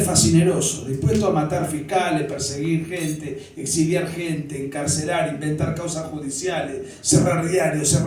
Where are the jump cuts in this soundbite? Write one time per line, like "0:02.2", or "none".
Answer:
none